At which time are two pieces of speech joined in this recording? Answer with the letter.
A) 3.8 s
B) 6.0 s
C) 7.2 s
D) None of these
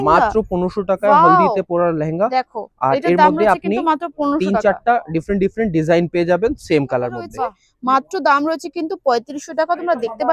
C